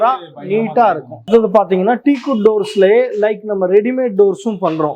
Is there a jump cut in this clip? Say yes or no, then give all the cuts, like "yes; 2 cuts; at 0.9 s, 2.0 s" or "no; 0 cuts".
no; 0 cuts